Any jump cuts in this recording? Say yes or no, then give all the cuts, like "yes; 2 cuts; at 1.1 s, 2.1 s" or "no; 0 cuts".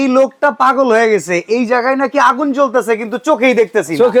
no; 0 cuts